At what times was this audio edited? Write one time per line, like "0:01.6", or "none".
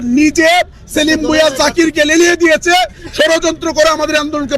none